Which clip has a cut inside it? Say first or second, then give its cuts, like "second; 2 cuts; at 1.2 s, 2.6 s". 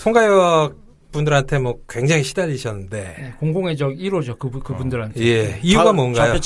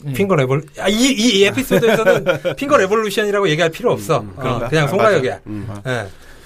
first; 1 cut; at 1.6 s